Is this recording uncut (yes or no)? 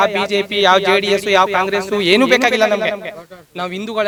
yes